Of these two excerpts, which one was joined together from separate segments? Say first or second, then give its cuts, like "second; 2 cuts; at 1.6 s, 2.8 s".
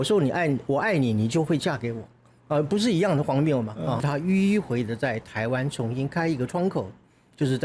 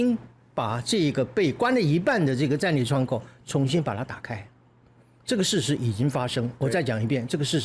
first; 1 cut; at 4.0 s